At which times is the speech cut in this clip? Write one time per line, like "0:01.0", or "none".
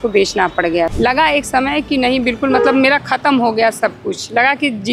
0:00.9